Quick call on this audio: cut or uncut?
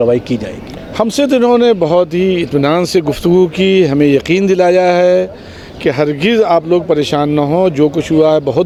uncut